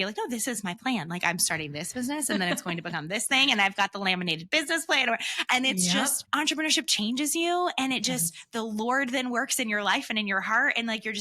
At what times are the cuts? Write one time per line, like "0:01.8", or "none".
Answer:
0:06.2